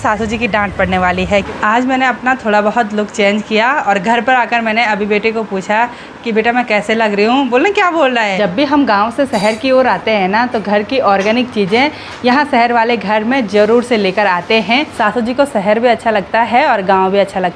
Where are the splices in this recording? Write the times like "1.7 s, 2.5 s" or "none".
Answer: 1.5 s, 8.4 s, 14.9 s